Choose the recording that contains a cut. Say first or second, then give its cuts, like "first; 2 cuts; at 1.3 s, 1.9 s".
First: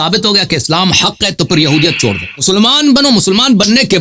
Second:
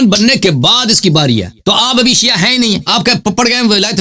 second; 2 cuts; at 1.6 s, 2.8 s